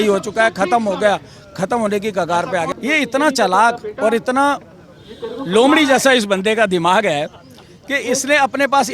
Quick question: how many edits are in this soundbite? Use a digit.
1